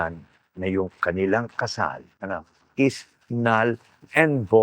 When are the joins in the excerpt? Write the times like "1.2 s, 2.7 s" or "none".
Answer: 2.1 s